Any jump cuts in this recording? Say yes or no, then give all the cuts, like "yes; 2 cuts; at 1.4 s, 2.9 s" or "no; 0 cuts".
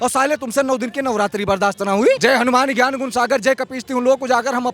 yes; 1 cut; at 2.2 s